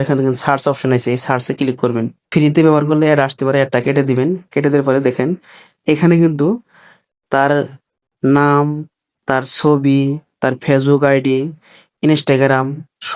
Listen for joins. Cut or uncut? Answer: cut